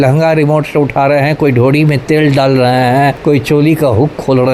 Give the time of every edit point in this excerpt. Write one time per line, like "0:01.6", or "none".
0:03.2